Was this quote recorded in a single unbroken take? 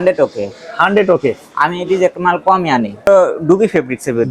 no; 1 cut; at 3.1 s

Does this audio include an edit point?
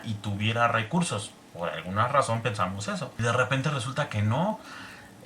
yes; 1 cut; at 3.1 s

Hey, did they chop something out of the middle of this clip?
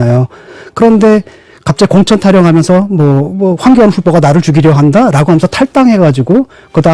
no; 0 cuts

